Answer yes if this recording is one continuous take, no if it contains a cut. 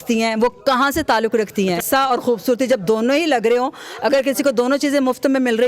no